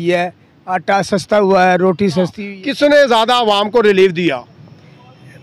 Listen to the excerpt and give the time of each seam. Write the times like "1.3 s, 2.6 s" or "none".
2.4 s